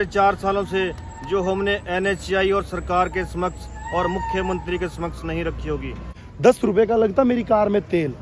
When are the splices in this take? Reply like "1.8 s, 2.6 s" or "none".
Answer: 6.2 s